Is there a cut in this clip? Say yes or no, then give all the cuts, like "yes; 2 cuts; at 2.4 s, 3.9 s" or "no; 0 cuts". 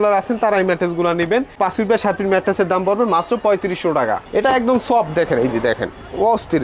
yes; 1 cut; at 4.2 s